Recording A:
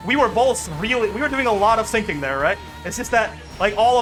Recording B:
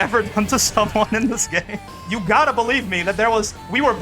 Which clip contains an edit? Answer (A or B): B